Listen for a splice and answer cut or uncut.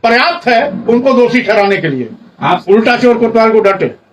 cut